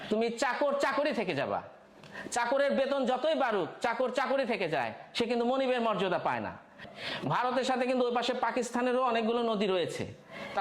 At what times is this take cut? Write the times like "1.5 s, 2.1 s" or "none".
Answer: 6.9 s